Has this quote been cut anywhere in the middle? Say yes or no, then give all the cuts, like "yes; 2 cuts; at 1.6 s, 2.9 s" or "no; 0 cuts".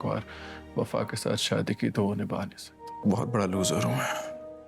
yes; 1 cut; at 2.9 s